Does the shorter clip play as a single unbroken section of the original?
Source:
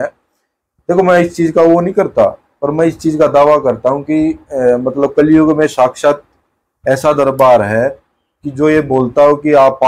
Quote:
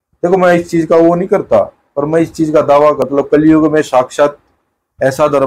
no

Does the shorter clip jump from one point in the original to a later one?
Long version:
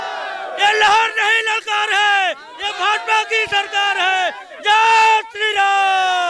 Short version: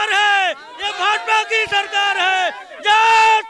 no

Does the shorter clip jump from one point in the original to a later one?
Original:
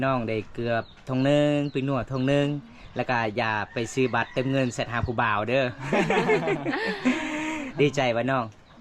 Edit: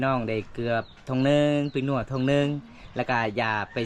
no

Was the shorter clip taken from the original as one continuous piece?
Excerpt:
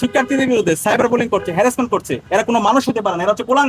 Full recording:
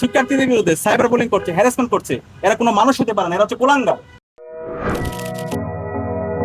no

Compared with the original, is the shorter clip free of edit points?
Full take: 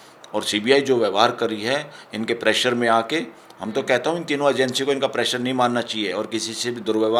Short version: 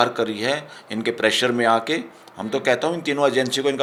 yes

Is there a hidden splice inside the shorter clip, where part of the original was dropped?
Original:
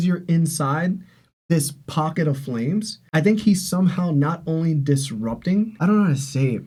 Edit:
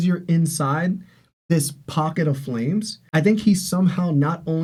no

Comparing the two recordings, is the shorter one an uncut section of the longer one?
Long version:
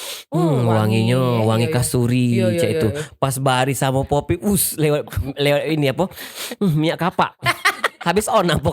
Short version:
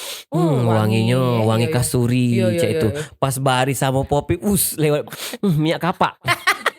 no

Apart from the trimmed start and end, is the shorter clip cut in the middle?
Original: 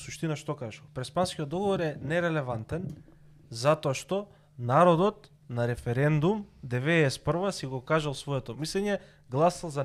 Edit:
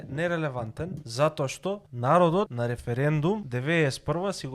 yes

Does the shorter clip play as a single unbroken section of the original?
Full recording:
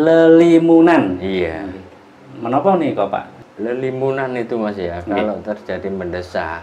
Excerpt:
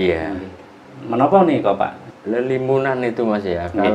yes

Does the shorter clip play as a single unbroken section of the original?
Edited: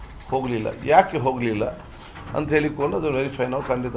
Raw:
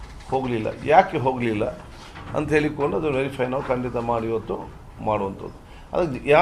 yes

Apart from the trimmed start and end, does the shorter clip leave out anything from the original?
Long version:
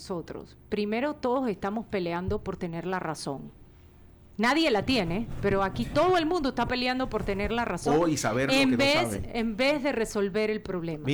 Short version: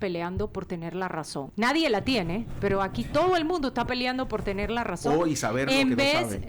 yes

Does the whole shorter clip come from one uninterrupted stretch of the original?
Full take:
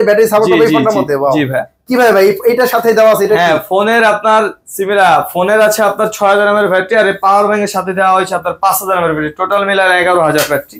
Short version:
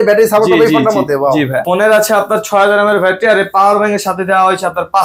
no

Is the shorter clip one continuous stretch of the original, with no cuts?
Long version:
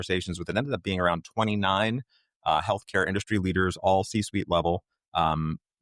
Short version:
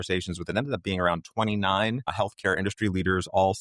no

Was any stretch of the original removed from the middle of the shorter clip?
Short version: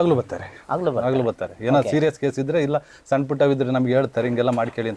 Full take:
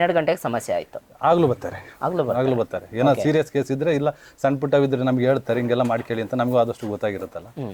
no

